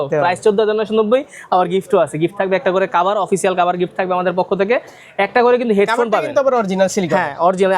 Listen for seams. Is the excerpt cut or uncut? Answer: uncut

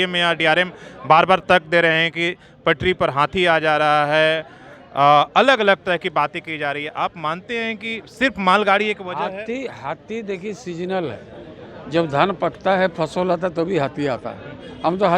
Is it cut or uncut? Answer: uncut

